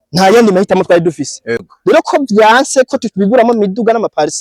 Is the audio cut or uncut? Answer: cut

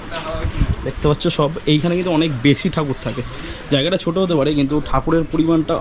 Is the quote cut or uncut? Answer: uncut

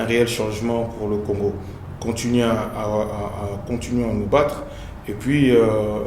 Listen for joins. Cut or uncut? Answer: uncut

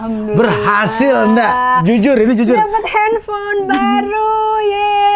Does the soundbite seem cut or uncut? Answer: uncut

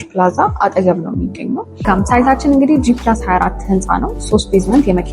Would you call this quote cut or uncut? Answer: cut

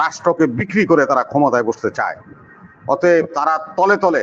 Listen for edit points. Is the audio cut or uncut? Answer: uncut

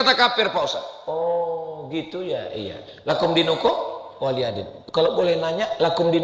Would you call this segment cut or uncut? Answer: uncut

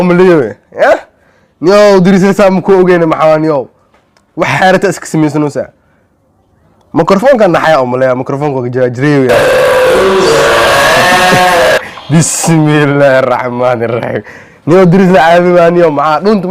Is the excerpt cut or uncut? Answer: uncut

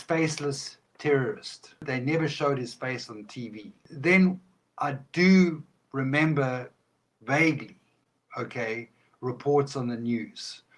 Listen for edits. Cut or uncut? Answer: cut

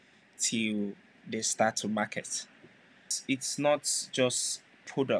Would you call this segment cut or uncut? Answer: cut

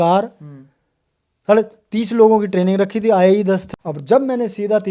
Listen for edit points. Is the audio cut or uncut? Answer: cut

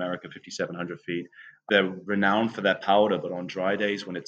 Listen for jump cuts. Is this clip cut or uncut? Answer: cut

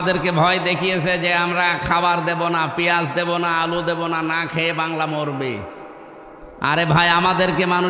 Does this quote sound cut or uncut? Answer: uncut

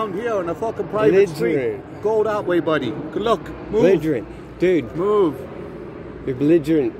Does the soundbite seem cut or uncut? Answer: uncut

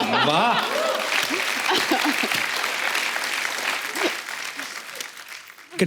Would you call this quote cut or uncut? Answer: uncut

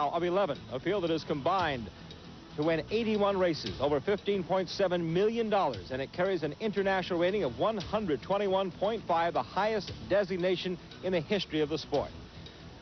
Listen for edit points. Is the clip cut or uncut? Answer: uncut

